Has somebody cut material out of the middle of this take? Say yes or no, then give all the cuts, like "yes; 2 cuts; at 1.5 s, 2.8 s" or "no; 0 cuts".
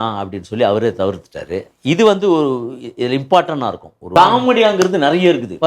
yes; 1 cut; at 4.1 s